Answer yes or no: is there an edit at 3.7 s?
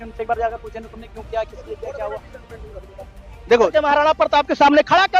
yes